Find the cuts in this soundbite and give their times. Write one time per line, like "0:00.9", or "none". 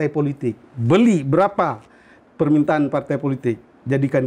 none